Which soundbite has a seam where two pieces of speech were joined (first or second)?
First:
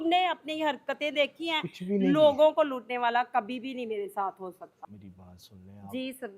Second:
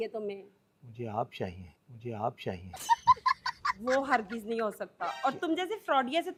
first